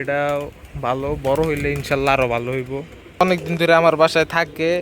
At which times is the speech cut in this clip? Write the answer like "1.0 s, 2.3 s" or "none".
3.2 s